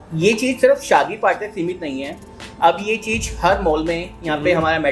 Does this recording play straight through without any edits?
yes; 0 cuts

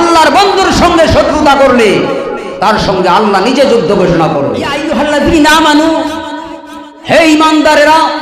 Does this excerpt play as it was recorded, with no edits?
no; 1 cut; at 4.8 s

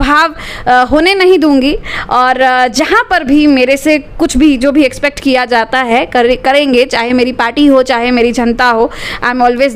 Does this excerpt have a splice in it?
no; 0 cuts

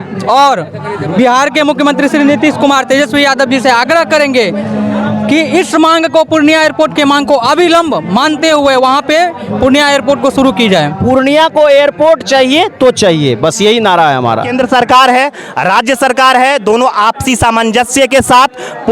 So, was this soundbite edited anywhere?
yes; 2 cuts; at 11.0 s, 14.5 s

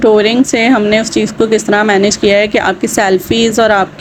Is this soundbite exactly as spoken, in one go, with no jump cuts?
yes; 0 cuts

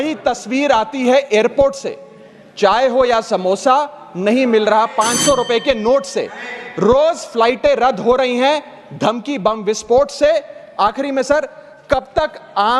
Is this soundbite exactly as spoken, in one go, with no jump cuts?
yes; 0 cuts

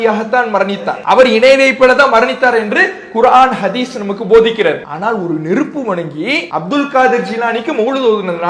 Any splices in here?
yes; 3 cuts; at 0.9 s, 4.9 s, 6.5 s

